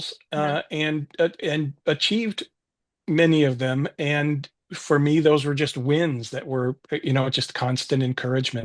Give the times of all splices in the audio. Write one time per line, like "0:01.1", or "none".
none